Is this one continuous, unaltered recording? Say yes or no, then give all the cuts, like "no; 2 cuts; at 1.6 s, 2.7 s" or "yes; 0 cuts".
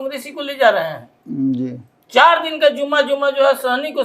yes; 0 cuts